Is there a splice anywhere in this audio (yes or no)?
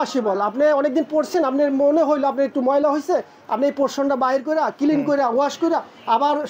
no